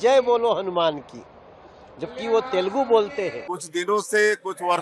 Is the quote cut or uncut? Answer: cut